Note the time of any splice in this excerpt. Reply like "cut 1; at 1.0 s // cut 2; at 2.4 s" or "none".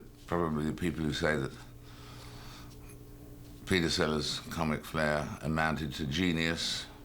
none